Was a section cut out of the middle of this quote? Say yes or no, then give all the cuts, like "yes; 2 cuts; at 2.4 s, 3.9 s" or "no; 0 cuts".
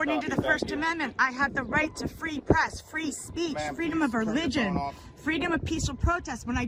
no; 0 cuts